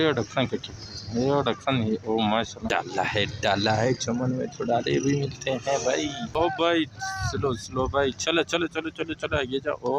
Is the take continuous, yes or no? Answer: no